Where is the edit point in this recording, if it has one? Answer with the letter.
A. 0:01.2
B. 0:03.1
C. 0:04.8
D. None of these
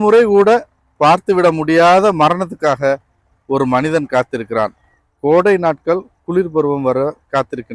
C